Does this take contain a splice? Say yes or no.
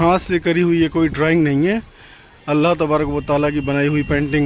no